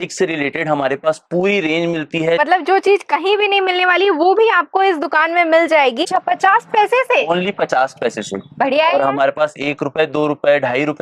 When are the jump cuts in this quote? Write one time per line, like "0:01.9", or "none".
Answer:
0:02.4
0:06.0